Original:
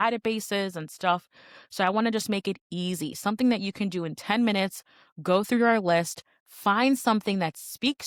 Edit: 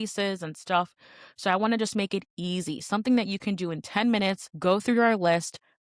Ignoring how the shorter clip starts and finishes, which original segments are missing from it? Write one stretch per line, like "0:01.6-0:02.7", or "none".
0:04.8-0:05.1

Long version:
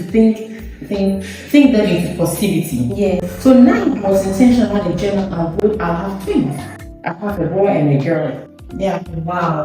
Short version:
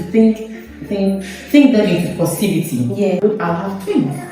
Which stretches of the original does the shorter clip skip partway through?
0:03.2-0:05.6

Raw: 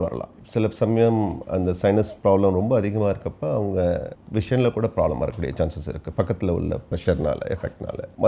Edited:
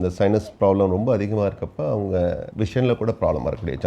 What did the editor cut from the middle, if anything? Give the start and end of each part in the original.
0:04.1-0:04.2

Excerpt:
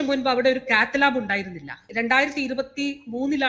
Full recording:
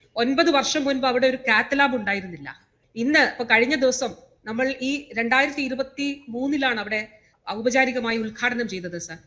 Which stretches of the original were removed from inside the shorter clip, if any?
0:02.6-0:05.1

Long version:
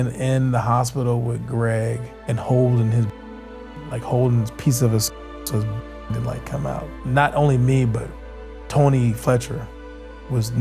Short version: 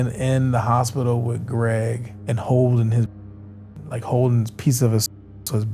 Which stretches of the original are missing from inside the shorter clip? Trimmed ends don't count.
none

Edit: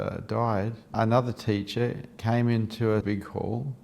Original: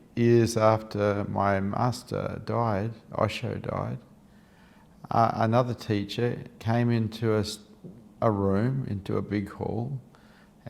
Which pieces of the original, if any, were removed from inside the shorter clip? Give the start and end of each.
0:03.1-0:05.3
0:07.5-0:09.3

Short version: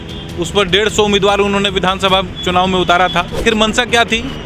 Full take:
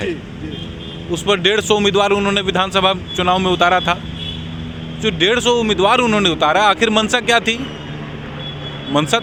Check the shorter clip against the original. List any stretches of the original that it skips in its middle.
0:04.1-0:06.8

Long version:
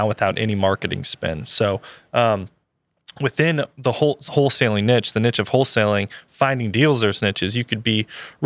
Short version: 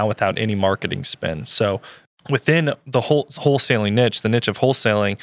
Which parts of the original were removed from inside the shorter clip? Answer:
0:01.9-0:02.9

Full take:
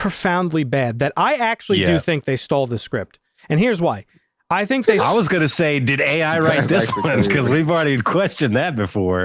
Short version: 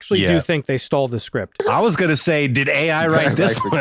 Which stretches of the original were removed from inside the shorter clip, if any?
0:03.2-0:05.0

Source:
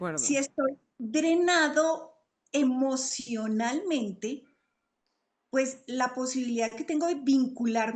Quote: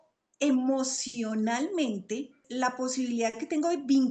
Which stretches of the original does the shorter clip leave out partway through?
0:04.5-0:05.8

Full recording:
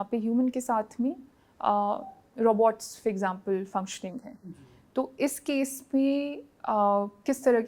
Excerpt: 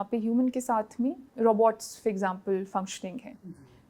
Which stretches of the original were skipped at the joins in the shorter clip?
0:01.2-0:02.2

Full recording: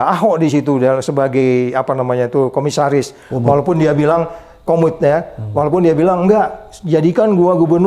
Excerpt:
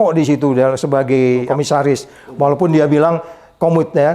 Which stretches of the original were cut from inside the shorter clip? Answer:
0:01.7-0:02.5

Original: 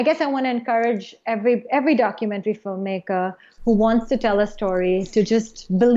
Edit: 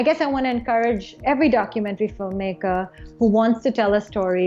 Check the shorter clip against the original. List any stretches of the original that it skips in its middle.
0:01.2-0:01.6

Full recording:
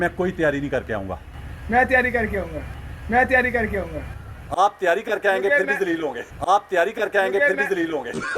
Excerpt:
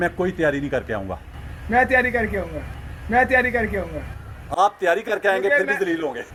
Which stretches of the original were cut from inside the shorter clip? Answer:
none

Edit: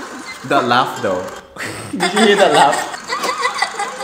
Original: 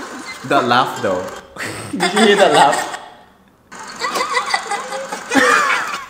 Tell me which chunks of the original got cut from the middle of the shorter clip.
0:03.0-0:03.9

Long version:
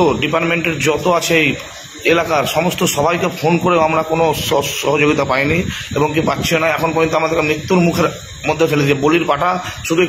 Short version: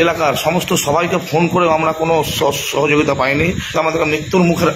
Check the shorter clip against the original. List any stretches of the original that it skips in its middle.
0:05.8-0:07.1

